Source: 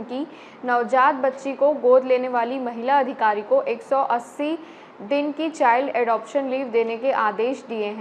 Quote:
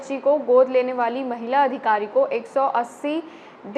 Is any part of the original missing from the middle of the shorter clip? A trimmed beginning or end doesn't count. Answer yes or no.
no